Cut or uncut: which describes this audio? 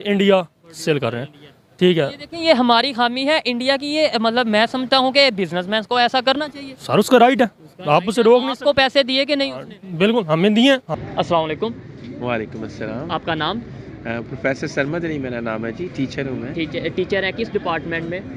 uncut